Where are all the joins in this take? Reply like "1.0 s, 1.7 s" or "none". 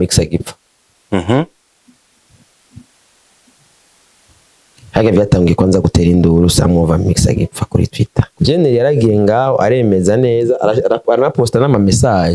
8.3 s